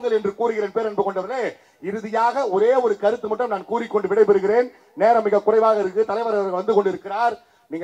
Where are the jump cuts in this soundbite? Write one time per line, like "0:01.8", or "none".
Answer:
none